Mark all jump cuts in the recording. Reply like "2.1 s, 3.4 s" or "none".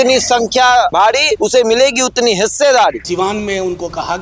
1.1 s, 3.0 s